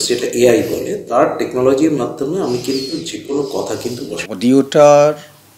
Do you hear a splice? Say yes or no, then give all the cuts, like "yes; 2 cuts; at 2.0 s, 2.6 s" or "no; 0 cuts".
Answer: yes; 1 cut; at 4.2 s